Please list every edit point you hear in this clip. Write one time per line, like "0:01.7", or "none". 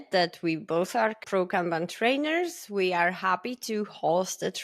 0:01.2